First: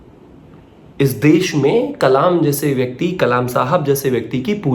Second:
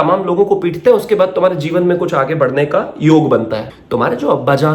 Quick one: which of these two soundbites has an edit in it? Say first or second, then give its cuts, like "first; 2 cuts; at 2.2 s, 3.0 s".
second; 1 cut; at 3.7 s